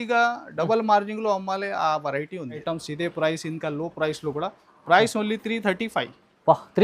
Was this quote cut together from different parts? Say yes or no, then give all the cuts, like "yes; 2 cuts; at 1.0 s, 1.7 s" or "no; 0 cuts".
yes; 1 cut; at 2.6 s